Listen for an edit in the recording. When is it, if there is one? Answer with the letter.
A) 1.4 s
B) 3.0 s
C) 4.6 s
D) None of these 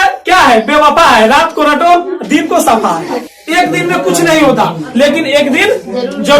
B